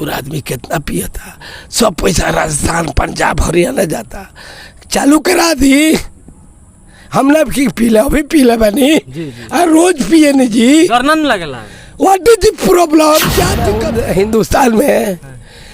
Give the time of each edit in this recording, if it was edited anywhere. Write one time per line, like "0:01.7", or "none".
0:13.8

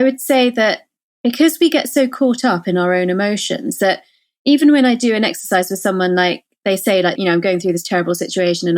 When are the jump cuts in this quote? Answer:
0:07.1

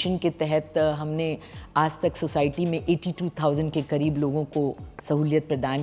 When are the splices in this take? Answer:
none

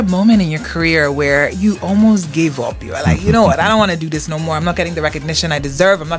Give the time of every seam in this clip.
none

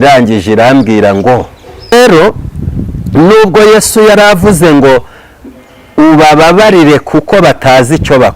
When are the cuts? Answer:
0:01.9

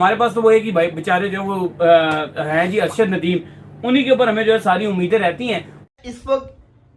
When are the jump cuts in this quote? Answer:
0:05.8

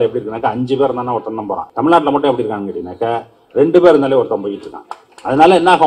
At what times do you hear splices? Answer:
0:01.7

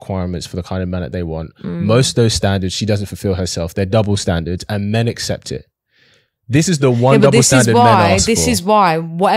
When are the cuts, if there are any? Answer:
none

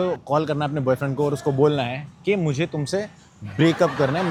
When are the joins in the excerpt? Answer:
none

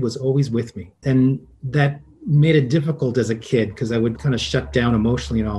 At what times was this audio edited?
0:01.0
0:04.2

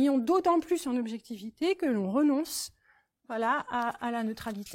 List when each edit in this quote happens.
none

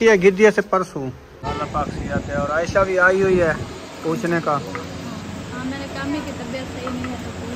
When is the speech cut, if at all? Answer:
0:01.5

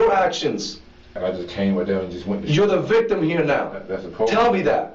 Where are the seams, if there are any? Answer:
0:01.2

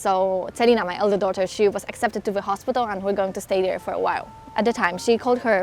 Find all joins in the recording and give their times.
0:04.4

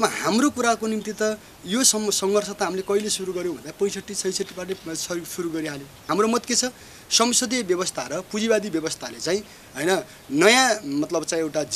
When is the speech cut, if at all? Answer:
0:06.0

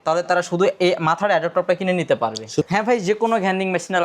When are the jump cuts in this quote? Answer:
0:02.6

